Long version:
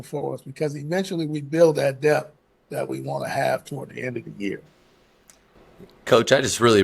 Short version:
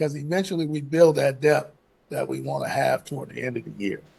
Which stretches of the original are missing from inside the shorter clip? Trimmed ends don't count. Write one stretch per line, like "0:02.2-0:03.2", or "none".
none